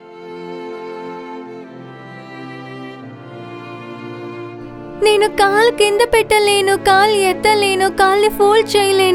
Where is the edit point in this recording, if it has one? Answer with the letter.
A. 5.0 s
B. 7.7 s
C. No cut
A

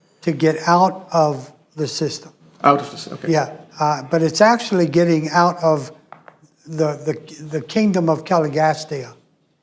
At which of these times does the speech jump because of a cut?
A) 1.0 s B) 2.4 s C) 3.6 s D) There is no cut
C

